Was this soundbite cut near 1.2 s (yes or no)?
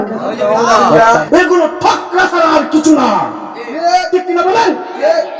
yes